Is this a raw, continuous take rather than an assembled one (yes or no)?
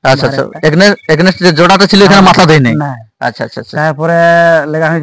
yes